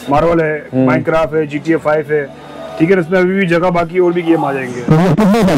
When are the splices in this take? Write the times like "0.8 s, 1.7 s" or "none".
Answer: none